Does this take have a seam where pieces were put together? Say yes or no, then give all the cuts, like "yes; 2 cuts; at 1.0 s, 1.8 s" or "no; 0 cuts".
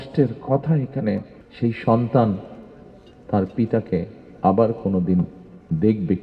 yes; 1 cut; at 1.4 s